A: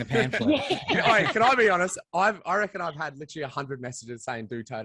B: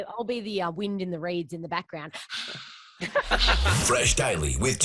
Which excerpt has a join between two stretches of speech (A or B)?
B